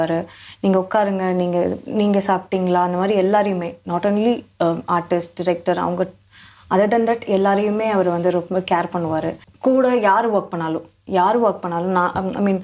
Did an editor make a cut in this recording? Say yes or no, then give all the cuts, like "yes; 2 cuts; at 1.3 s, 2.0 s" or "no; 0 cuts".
yes; 1 cut; at 9.4 s